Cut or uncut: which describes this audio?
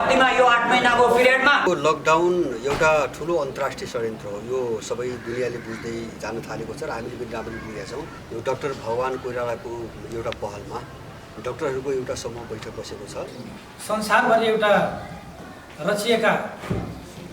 cut